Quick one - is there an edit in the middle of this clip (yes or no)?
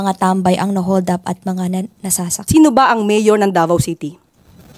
yes